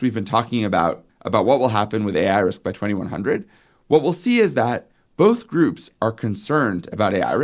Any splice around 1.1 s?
yes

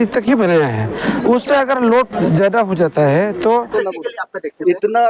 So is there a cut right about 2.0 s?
no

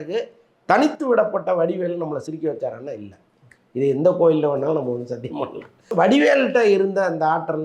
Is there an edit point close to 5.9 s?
yes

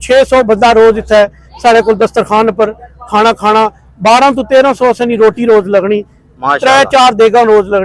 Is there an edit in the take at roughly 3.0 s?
no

